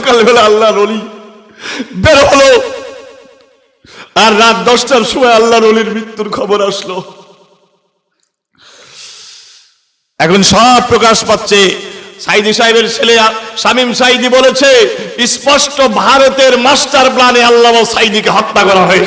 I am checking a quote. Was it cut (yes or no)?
no